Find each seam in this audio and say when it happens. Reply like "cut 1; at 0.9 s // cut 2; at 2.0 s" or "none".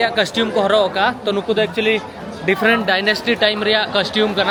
none